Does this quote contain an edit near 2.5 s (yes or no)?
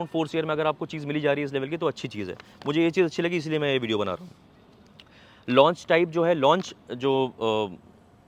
no